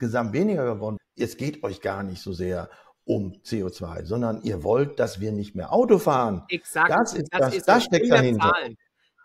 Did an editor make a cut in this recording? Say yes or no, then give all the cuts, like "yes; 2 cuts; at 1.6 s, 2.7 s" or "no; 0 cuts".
yes; 1 cut; at 0.9 s